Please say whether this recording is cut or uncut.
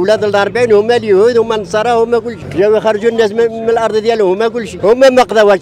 cut